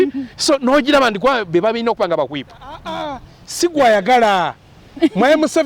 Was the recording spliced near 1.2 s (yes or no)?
no